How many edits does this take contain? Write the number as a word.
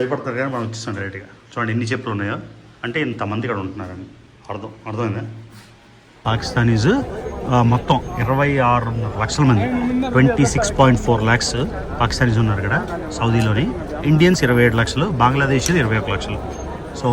one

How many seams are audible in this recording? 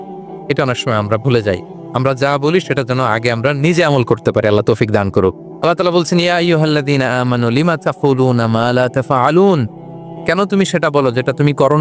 one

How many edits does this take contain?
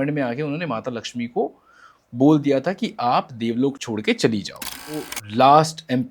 one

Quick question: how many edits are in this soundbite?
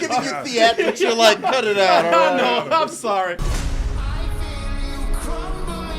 one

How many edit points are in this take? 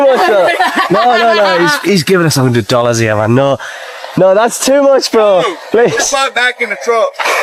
zero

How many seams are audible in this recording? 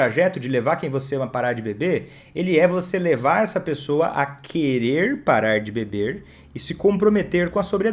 zero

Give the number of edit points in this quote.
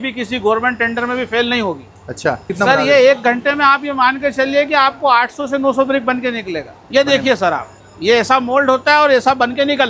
two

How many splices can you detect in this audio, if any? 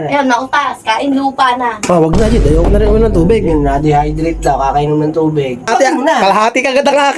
one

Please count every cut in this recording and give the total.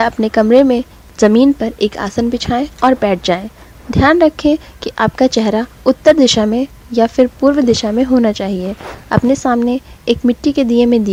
zero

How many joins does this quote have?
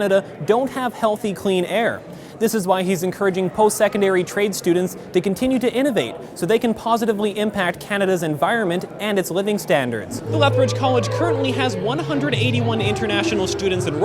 one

